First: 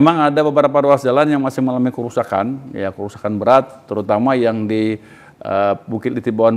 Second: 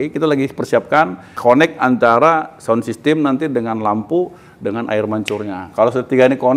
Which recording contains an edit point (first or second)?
second